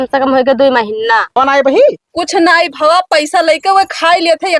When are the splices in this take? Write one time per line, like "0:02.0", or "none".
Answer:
0:01.4

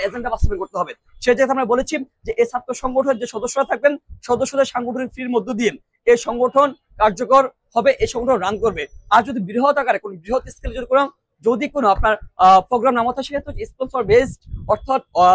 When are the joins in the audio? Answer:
none

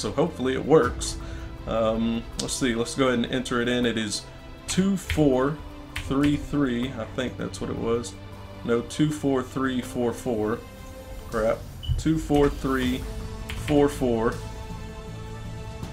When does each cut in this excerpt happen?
none

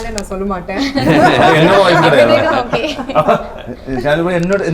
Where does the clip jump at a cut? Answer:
none

